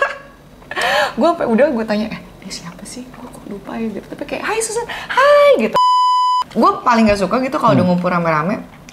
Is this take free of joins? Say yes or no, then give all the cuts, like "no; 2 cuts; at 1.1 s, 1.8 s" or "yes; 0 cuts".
no; 1 cut; at 6.1 s